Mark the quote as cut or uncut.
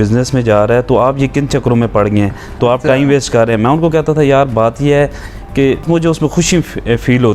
cut